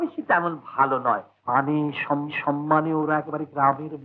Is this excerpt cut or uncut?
uncut